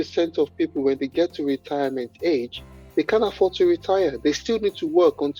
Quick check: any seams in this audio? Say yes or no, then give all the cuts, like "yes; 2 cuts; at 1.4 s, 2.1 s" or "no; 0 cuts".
no; 0 cuts